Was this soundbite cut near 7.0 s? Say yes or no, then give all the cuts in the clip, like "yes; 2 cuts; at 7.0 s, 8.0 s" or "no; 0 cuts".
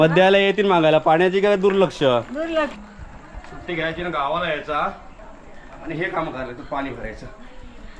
no; 1 cut; at 2.8 s